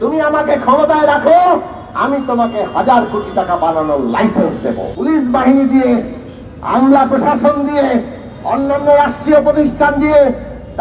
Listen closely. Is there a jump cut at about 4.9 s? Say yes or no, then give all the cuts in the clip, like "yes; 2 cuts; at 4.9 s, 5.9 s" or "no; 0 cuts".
yes; 1 cut; at 4.9 s